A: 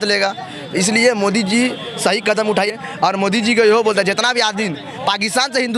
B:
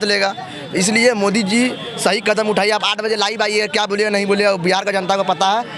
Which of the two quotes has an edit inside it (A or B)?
A